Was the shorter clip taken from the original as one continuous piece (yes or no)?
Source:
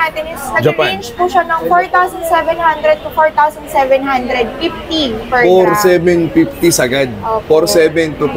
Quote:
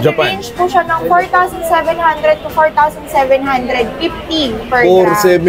yes